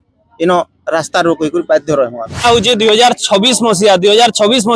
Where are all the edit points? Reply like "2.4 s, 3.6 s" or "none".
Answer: 2.4 s